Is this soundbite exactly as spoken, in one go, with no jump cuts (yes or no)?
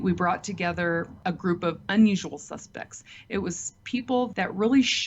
yes